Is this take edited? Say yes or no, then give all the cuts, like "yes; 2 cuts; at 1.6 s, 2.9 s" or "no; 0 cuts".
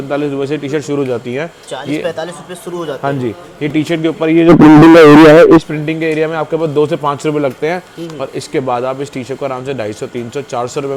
no; 0 cuts